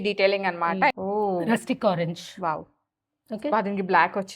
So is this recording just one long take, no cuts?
no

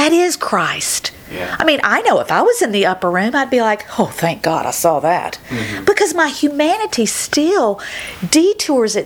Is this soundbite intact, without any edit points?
yes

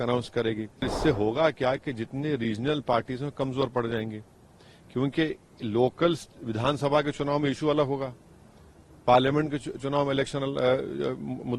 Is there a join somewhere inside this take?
yes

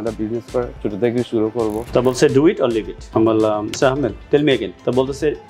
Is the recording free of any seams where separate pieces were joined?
no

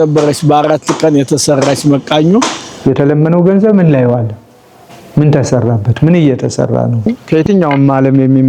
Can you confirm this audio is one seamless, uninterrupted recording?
no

